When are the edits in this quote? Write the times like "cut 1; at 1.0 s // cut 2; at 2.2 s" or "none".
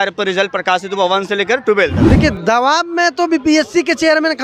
cut 1; at 2.0 s